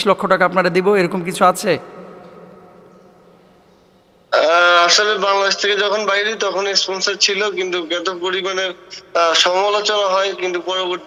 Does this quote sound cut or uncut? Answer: uncut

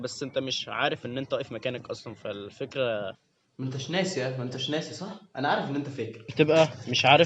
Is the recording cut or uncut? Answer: cut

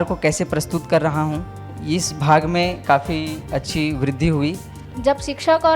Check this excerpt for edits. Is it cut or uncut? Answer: cut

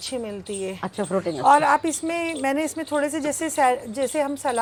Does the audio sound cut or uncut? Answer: uncut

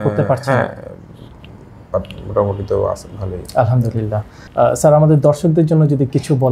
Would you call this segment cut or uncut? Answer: uncut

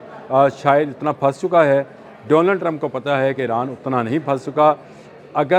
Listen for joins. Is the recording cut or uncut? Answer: uncut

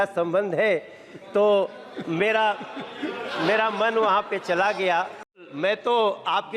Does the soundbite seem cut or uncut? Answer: cut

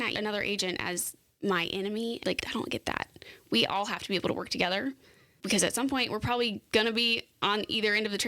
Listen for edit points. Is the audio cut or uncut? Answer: cut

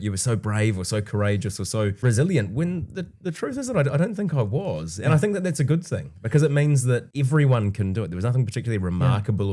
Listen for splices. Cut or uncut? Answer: cut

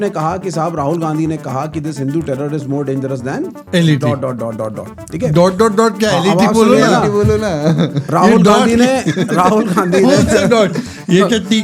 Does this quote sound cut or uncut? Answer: uncut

